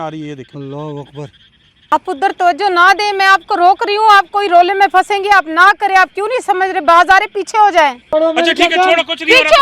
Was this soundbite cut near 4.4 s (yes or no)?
no